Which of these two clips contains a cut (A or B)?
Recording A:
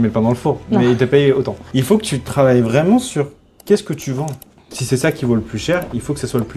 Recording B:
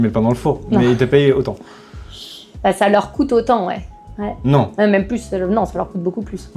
A